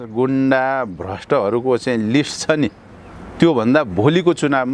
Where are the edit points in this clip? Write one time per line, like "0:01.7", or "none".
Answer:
none